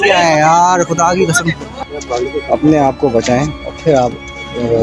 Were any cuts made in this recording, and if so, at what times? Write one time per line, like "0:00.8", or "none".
0:01.8